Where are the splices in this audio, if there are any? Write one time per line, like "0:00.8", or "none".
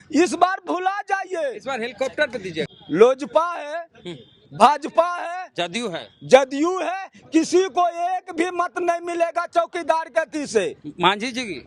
0:02.7